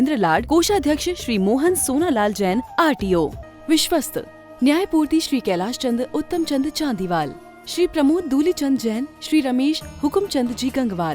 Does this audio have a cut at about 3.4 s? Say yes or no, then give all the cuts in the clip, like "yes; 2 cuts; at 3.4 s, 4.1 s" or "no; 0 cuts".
yes; 1 cut; at 3.4 s